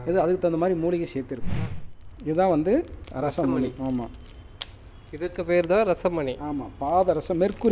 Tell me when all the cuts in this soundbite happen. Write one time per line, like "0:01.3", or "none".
0:01.8